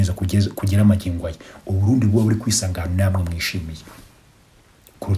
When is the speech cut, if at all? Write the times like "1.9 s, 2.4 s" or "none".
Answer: none